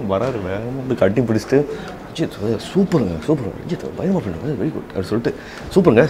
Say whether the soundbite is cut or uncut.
uncut